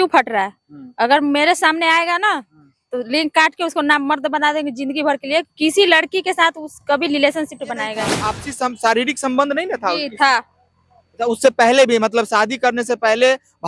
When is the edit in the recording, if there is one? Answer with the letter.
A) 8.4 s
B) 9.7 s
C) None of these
A